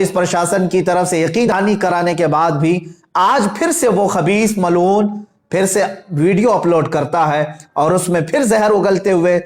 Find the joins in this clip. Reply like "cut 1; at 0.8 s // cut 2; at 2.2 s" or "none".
cut 1; at 1.5 s